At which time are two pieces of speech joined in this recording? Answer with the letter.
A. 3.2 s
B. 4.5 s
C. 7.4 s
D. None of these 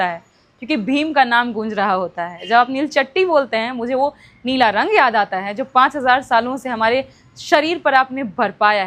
D